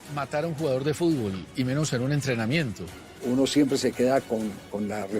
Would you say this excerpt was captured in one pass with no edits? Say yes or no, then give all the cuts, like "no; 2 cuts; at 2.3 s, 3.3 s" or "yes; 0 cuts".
no; 1 cut; at 3.1 s